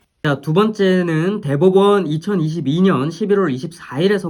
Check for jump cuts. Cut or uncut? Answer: uncut